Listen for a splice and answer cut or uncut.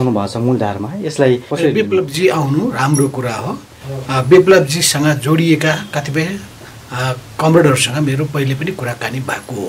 uncut